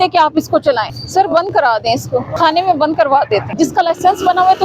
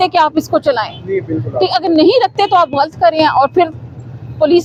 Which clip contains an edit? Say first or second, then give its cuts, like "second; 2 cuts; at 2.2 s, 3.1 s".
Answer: first; 3 cuts; at 1.0 s, 2.3 s, 3.5 s